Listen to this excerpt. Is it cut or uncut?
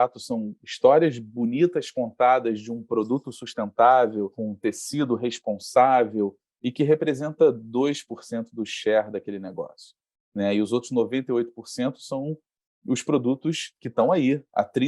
cut